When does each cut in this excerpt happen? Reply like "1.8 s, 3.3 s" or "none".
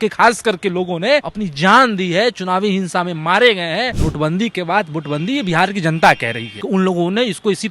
1.4 s, 4.0 s, 6.5 s

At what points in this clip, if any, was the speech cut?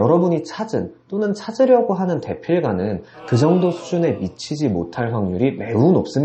none

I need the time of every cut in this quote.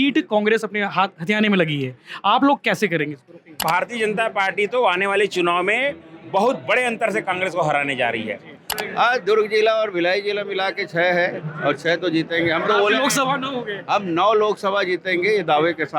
3.6 s, 8.7 s

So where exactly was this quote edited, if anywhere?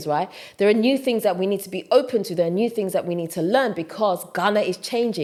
none

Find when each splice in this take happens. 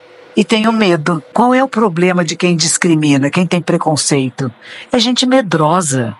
1.2 s

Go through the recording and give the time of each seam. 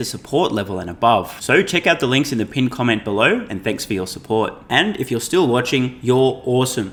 none

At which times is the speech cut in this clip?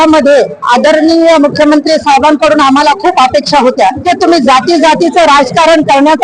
4.1 s

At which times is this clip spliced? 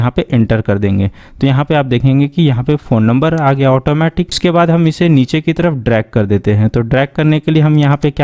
none

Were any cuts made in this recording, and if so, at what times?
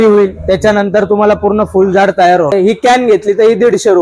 2.5 s

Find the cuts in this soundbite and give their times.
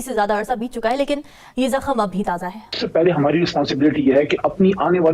2.7 s

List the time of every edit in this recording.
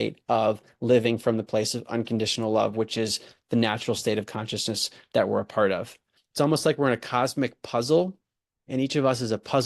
6.2 s

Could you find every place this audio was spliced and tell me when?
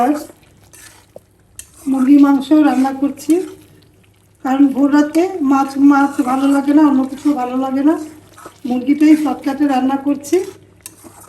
none

